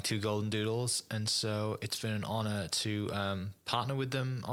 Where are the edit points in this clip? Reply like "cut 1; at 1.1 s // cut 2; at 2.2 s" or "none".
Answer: none